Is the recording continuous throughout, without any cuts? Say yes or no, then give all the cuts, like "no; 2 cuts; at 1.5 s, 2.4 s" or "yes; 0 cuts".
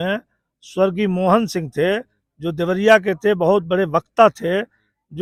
yes; 0 cuts